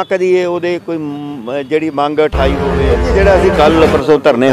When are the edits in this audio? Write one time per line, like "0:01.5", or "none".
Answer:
0:03.0

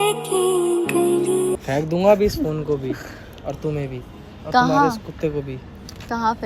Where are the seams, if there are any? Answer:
0:01.6

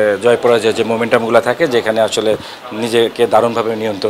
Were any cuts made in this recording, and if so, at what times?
none

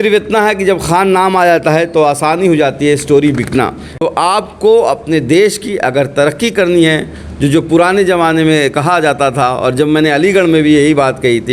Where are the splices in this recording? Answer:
0:03.9

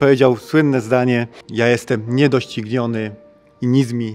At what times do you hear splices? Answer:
0:01.4

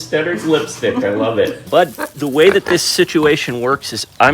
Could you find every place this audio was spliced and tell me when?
0:01.6

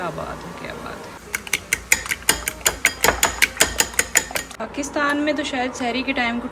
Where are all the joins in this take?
0:01.2
0:04.5

